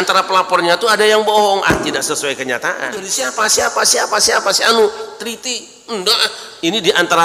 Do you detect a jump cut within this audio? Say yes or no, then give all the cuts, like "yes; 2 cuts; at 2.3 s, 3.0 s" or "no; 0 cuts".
yes; 1 cut; at 3.2 s